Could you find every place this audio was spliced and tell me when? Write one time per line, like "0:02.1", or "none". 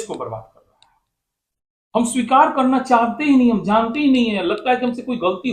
none

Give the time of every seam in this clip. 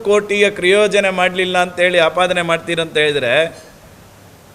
none

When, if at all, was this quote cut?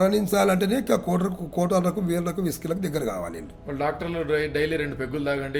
none

